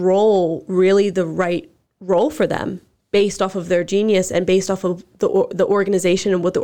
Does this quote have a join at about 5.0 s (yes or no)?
no